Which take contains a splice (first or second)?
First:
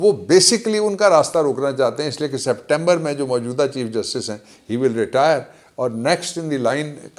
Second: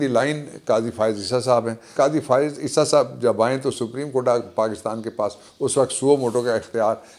second